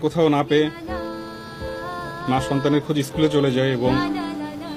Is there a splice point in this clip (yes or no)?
yes